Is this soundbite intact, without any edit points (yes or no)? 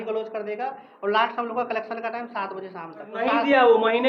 no